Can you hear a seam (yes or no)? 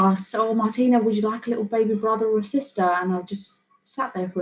no